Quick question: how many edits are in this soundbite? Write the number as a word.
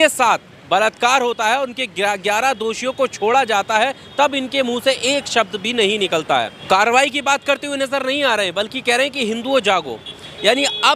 one